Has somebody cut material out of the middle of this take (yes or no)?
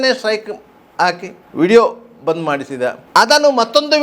yes